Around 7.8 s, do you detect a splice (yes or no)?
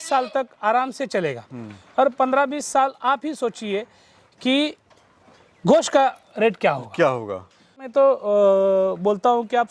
yes